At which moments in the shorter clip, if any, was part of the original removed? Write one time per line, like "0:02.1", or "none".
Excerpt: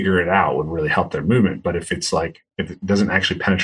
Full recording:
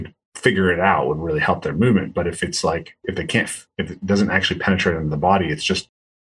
0:02.4